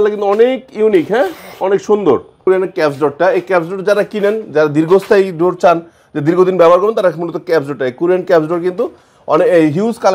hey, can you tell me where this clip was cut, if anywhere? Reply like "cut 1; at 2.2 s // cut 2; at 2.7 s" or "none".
cut 1; at 2.4 s